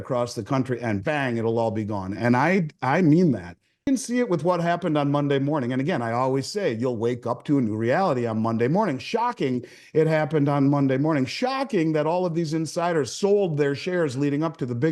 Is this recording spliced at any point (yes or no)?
yes